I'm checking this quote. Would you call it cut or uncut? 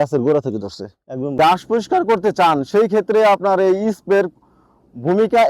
cut